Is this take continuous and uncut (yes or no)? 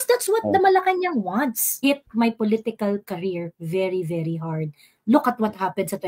no